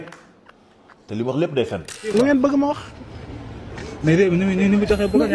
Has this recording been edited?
yes; 1 cut; at 2.1 s

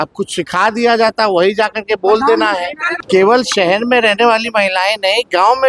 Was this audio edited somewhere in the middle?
yes; 1 cut; at 2.8 s

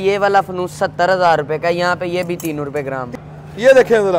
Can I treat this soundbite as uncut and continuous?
no; 1 cut; at 3.1 s

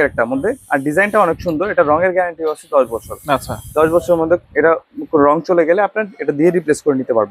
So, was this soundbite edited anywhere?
no; 0 cuts

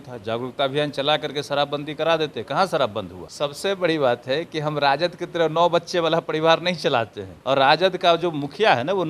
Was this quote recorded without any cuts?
no; 2 cuts; at 3.2 s, 7.3 s

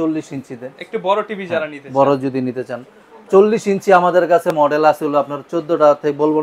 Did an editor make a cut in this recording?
no; 0 cuts

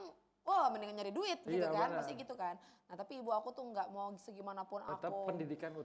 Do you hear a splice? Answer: no; 0 cuts

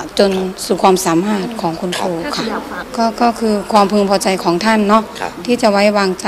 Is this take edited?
no; 0 cuts

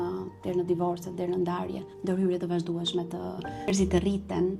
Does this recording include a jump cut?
yes; 1 cut; at 3.7 s

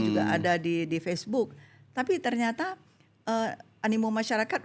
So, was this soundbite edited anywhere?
no; 0 cuts

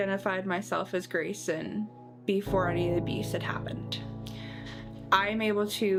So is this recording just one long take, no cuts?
yes; 0 cuts

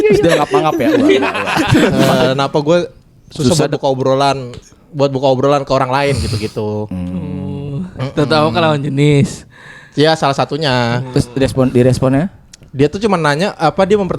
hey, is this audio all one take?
no; 1 cut; at 2.0 s

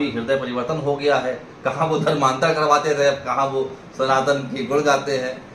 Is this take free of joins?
yes; 0 cuts

